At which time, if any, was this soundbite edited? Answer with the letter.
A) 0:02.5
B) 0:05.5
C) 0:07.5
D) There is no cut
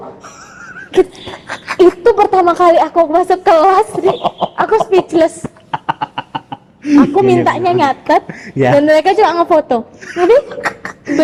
D